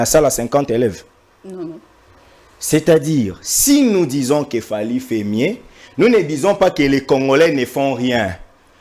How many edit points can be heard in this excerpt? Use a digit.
0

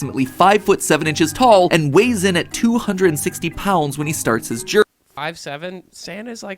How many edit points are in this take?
1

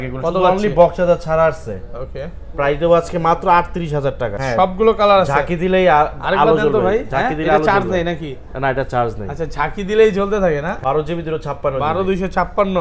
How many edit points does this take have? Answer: 2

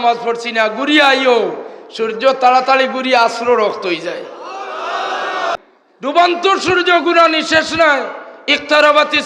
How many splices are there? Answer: 1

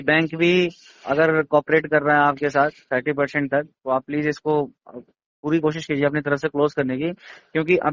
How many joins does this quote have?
0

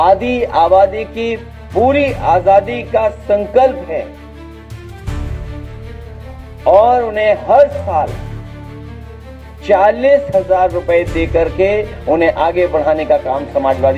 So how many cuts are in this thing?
2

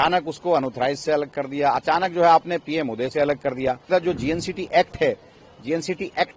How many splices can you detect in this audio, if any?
1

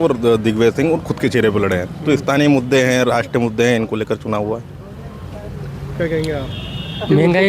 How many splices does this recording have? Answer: 0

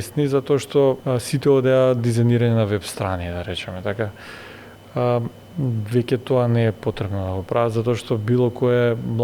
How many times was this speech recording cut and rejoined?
1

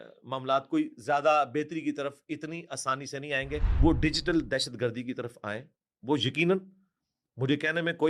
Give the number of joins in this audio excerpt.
1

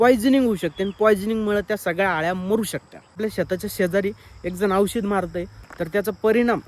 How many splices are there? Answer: 1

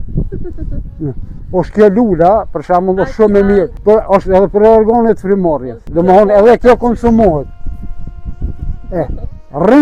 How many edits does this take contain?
2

